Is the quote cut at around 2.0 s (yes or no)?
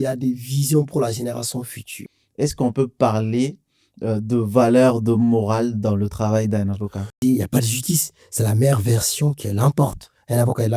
yes